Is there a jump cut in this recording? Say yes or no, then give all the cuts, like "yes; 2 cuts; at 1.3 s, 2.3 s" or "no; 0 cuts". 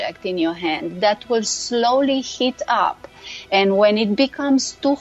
no; 0 cuts